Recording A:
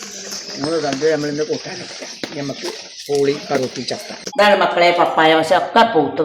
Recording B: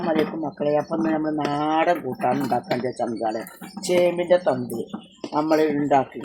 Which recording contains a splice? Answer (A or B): A